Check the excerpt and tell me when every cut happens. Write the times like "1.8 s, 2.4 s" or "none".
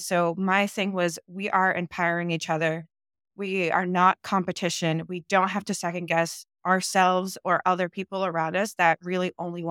none